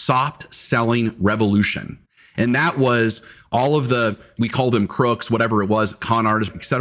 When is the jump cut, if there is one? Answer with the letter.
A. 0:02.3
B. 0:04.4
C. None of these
B